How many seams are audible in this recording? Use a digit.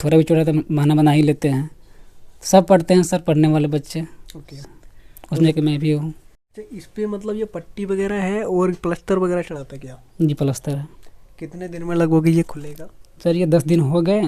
1